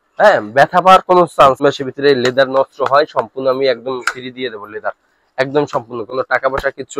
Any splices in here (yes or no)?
yes